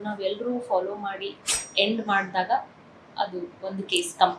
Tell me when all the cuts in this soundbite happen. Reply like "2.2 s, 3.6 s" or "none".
1.6 s